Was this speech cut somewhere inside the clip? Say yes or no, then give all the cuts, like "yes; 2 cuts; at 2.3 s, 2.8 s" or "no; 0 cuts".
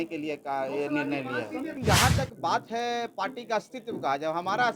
yes; 1 cut; at 1.8 s